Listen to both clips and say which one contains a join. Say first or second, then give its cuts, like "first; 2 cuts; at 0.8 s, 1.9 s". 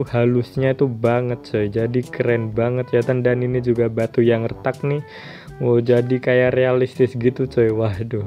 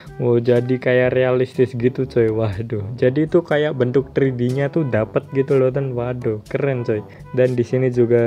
second; 1 cut; at 7.2 s